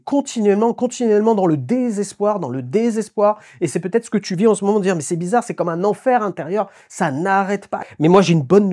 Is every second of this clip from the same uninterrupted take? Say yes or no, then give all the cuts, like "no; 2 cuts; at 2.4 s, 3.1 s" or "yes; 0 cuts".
no; 1 cut; at 7.8 s